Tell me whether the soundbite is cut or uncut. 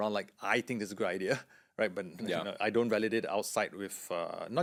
uncut